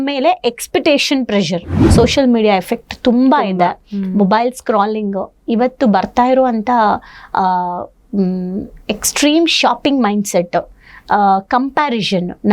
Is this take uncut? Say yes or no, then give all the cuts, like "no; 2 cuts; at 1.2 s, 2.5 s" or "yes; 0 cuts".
no; 1 cut; at 1.8 s